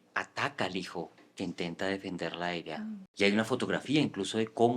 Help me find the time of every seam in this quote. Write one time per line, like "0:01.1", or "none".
0:03.1